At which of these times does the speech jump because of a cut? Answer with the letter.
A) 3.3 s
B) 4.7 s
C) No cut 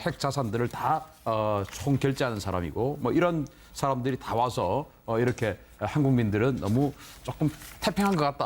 B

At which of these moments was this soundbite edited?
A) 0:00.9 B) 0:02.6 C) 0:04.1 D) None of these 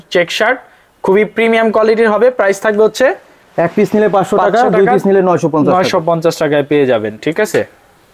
D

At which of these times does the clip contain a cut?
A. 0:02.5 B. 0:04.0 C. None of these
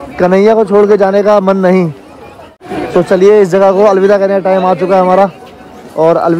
A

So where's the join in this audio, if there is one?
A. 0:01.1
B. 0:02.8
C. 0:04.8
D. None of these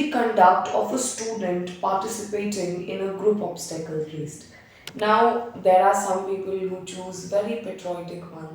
C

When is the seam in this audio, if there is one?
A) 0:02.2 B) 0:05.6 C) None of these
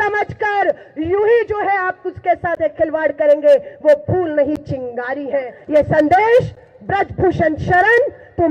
B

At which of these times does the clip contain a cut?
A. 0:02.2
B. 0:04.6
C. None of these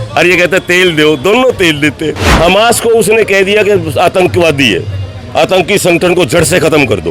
A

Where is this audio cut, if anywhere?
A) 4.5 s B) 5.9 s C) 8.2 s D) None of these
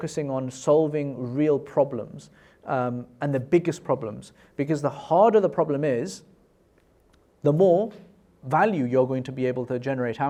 D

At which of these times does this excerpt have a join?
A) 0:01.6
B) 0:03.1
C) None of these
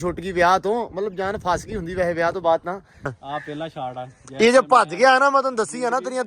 B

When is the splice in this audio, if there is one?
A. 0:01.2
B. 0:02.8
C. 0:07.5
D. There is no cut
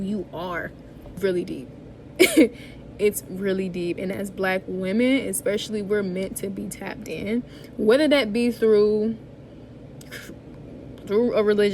A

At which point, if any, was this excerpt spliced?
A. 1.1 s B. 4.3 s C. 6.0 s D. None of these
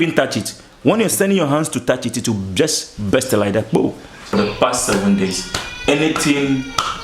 B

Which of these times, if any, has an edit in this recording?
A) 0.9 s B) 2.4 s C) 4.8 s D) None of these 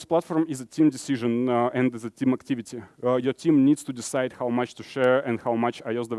D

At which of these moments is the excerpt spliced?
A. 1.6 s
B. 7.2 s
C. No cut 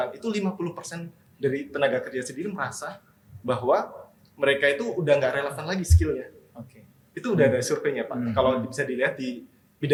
C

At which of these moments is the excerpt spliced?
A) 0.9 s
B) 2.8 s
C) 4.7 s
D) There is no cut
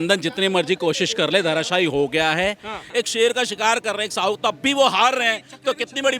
B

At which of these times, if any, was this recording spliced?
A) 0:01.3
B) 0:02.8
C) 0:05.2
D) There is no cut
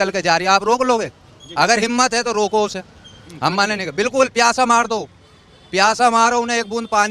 D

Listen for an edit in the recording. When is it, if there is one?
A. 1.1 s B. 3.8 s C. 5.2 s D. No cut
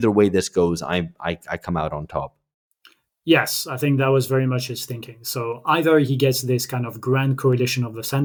D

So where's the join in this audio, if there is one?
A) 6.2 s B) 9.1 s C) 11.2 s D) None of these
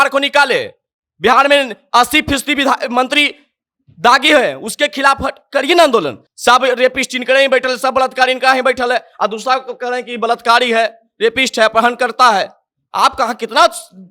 A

